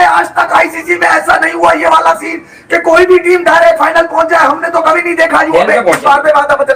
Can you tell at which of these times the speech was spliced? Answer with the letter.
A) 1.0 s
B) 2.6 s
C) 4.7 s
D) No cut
D